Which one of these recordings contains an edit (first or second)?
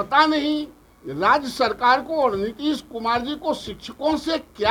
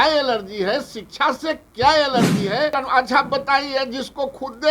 second